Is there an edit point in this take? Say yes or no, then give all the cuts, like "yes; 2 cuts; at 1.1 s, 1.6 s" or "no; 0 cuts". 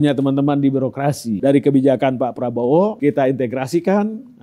yes; 2 cuts; at 1.4 s, 2.9 s